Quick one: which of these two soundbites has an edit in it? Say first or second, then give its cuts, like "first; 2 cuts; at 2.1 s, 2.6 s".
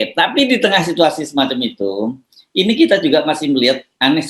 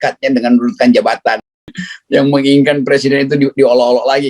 second; 1 cut; at 1.9 s